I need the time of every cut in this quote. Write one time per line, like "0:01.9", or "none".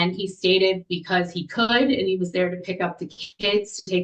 none